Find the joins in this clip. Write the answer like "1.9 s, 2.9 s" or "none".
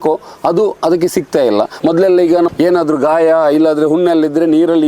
1.7 s, 2.5 s